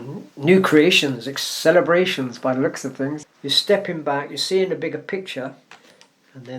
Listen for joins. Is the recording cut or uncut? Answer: cut